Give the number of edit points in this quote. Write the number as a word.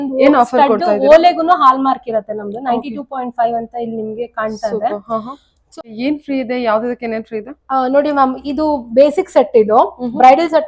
one